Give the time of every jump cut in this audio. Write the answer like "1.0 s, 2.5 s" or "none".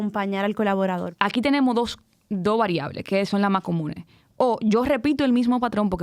1.1 s